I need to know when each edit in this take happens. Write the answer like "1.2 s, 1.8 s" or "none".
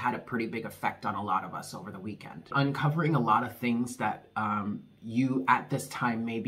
2.5 s